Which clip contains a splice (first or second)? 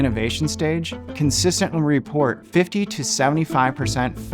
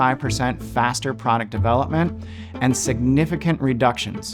first